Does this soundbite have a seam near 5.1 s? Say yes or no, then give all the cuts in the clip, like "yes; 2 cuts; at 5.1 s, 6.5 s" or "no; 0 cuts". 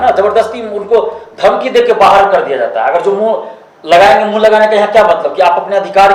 no; 0 cuts